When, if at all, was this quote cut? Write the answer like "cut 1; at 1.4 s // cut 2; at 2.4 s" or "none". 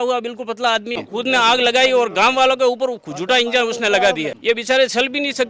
cut 1; at 1.0 s // cut 2; at 4.3 s